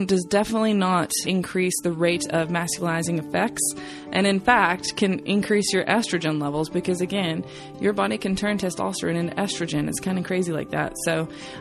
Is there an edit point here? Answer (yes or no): yes